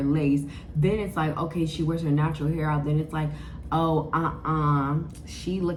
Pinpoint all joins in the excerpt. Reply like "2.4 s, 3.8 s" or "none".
none

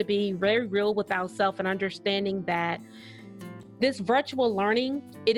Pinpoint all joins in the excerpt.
none

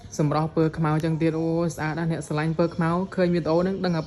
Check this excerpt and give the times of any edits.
none

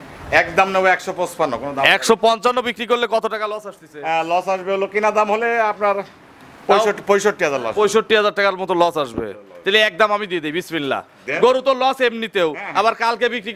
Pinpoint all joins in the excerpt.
none

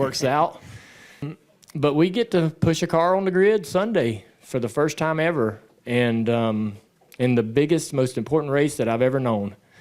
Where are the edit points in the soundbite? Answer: 1.2 s

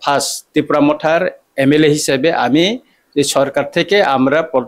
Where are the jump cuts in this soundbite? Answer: none

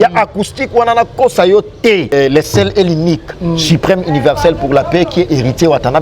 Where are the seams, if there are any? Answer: 2.1 s

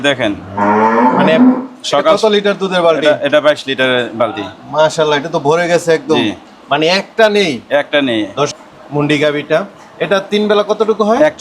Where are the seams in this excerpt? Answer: 8.6 s

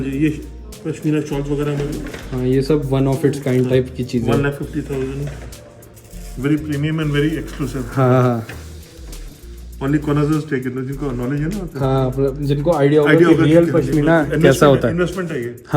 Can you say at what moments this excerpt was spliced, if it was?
none

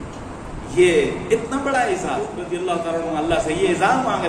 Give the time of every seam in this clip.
2.4 s

